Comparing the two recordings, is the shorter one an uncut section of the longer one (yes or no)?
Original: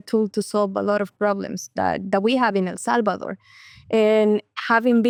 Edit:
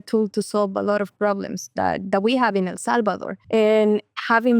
no